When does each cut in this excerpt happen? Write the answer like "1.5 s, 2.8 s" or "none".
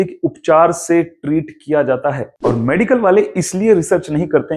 none